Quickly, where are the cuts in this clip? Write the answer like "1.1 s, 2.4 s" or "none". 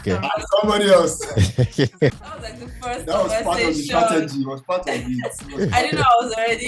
2.2 s